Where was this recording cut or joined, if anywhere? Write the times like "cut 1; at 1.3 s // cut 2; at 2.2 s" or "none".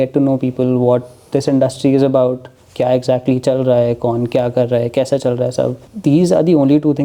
cut 1; at 5.9 s